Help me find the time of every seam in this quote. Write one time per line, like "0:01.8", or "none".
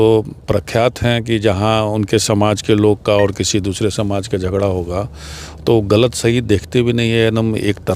none